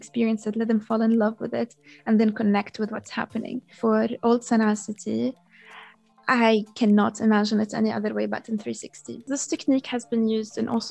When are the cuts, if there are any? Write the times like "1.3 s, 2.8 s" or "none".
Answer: 3.7 s, 9.3 s